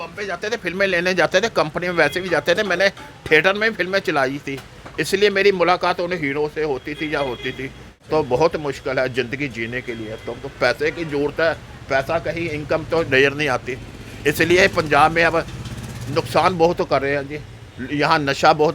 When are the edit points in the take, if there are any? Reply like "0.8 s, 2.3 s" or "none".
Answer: 8.1 s